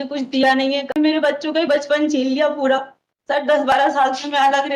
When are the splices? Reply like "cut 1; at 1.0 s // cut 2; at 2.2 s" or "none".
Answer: cut 1; at 0.9 s // cut 2; at 3.4 s